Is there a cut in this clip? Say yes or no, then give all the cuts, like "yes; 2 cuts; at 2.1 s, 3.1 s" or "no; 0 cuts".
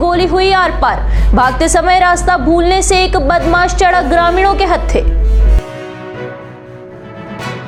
no; 0 cuts